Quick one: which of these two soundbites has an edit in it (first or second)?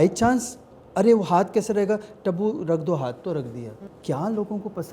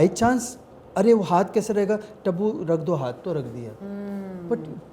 first